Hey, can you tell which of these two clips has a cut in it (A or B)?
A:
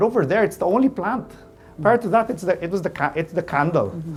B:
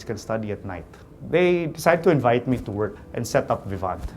B